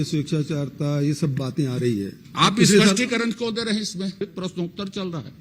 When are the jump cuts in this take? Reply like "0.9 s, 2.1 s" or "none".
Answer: 2.2 s, 4.2 s

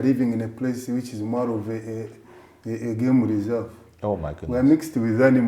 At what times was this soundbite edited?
none

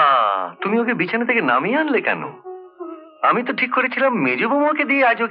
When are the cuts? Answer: none

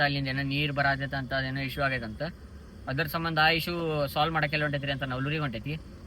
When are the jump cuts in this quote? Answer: none

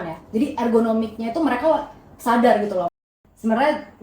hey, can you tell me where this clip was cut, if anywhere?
3.0 s

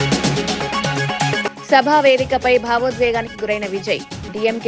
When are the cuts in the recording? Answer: 1.3 s

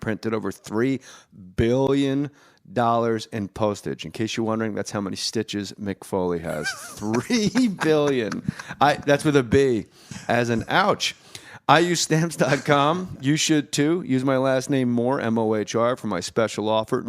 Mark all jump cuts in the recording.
3.0 s

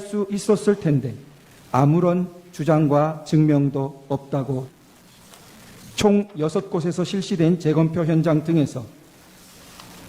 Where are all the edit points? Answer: 4.7 s

